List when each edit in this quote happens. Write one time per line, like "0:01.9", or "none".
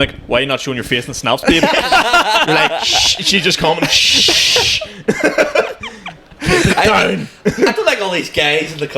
none